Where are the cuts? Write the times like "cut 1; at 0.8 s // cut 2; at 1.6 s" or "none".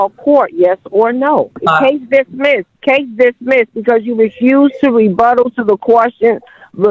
cut 1; at 1.6 s // cut 2; at 2.7 s